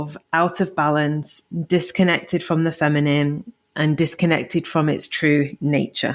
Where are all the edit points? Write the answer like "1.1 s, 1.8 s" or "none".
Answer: 1.5 s

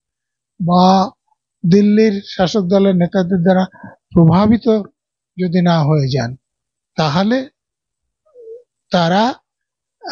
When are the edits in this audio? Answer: none

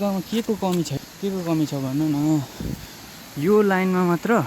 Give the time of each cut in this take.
0.9 s

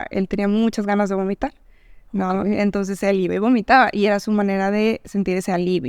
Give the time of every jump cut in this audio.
none

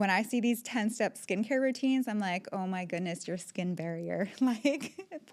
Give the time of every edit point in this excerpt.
none

